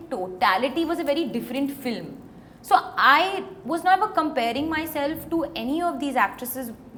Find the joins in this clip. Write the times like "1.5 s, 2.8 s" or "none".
none